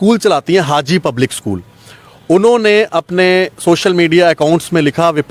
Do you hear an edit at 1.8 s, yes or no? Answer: no